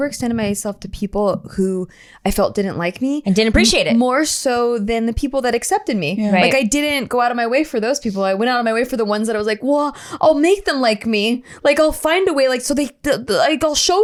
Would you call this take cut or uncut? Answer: uncut